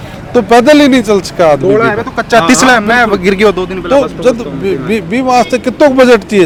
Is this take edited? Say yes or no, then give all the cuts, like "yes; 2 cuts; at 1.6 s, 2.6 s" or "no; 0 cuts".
no; 0 cuts